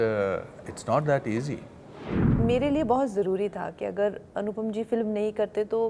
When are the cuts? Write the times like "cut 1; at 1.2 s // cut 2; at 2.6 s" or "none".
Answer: cut 1; at 2.2 s